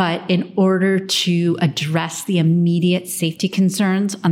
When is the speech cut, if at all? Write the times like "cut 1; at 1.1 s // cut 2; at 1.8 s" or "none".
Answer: none